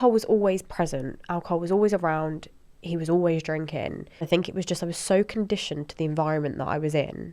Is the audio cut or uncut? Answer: cut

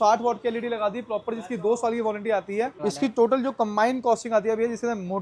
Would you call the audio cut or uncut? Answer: cut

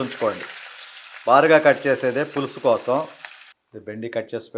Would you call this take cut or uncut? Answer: cut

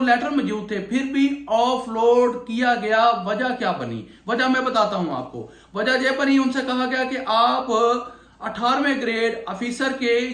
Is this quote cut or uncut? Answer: uncut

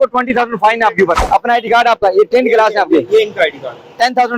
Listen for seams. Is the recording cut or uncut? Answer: cut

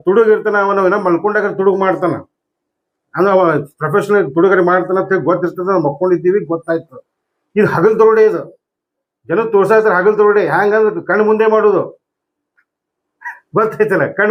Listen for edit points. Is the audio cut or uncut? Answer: uncut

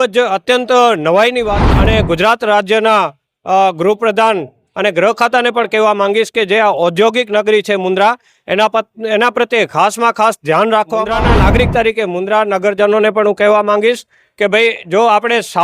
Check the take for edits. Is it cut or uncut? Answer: cut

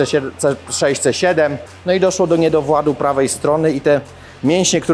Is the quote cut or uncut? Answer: cut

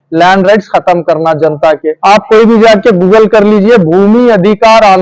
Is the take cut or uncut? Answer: cut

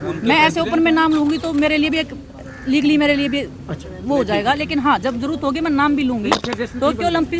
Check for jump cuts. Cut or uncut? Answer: uncut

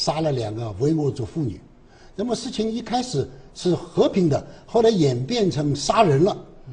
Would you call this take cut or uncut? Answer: cut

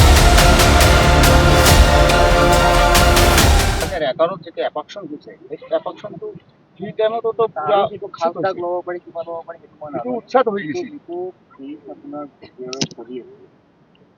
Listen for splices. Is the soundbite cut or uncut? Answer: cut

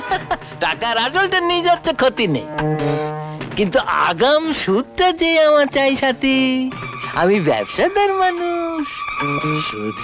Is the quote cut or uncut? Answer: uncut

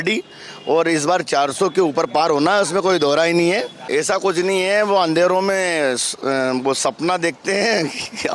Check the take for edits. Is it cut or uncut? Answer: cut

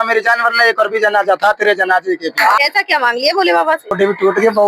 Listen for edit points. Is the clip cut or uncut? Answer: cut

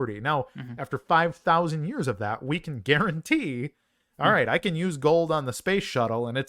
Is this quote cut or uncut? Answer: uncut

